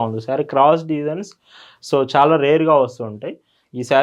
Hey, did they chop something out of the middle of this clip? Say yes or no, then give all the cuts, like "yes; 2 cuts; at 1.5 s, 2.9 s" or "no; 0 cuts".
no; 0 cuts